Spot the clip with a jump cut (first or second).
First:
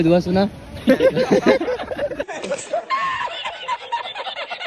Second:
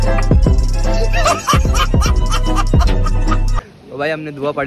second